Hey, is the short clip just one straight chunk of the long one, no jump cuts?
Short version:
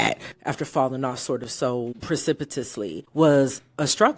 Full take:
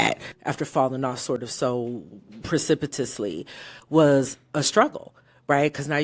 no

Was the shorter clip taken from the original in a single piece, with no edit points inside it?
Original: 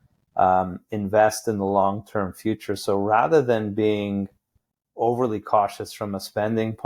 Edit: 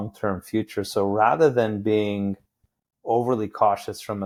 yes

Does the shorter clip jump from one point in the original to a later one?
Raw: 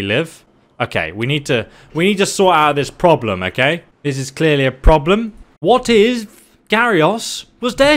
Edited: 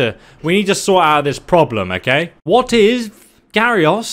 yes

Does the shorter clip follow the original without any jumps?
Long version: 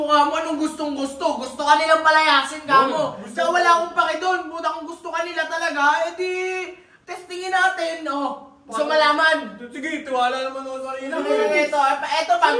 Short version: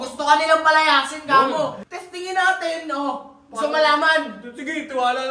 no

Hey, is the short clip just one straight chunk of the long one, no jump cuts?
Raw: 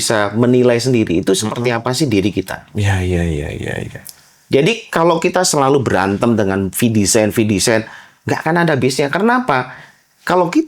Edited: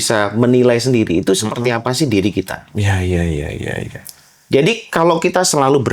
yes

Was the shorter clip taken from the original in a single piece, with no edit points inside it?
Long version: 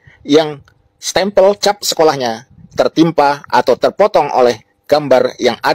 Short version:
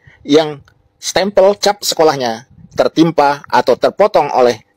yes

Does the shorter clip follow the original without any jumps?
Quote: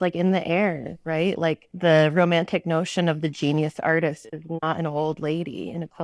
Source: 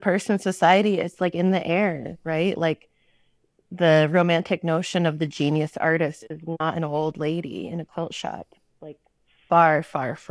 no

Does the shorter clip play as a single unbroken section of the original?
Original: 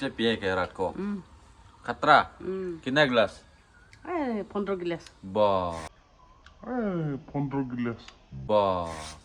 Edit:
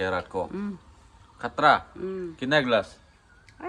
yes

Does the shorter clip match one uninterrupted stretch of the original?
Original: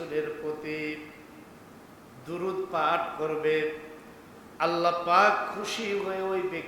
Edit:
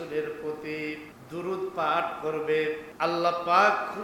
no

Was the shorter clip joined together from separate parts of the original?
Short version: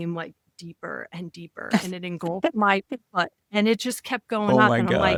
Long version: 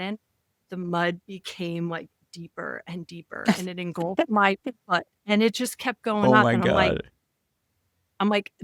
no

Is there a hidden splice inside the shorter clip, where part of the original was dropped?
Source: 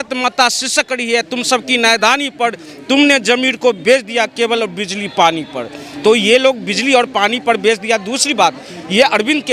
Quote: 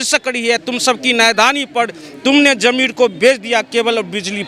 no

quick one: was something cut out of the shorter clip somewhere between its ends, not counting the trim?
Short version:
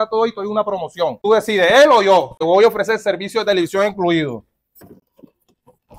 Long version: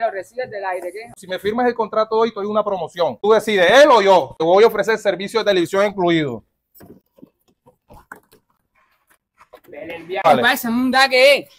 no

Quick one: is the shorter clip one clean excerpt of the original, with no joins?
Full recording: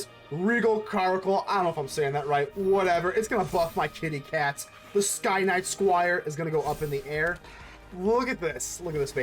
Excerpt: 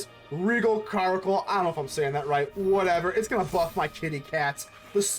yes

